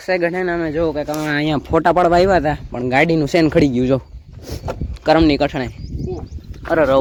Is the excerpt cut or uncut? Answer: uncut